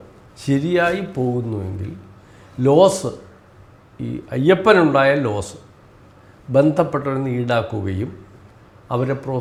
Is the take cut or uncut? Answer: uncut